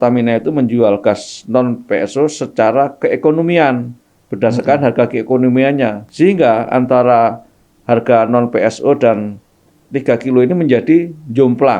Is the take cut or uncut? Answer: cut